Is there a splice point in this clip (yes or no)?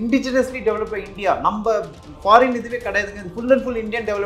no